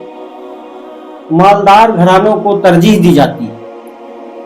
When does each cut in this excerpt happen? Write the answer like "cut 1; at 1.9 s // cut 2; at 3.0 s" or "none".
cut 1; at 3.5 s